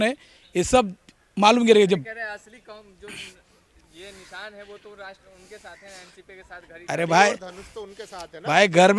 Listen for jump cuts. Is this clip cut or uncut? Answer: uncut